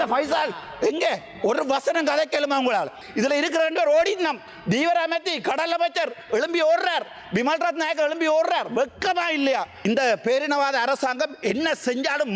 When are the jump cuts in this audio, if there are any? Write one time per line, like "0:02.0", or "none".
0:03.0
0:09.7

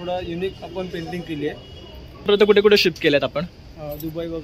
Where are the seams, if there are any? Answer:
0:02.3

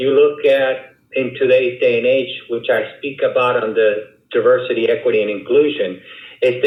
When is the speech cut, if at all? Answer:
none

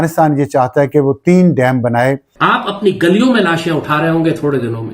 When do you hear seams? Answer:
0:02.3

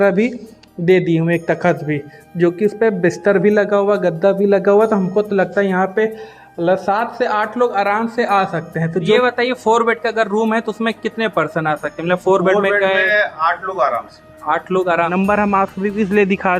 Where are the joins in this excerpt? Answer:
0:09.2
0:15.1

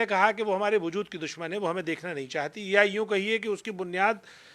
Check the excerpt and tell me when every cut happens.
none

